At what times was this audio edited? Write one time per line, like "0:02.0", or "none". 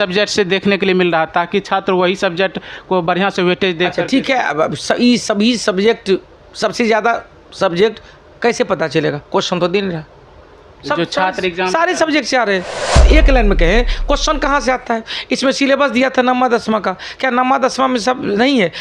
0:13.0